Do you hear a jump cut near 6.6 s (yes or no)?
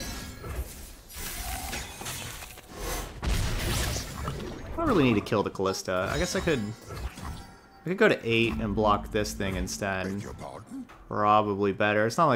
no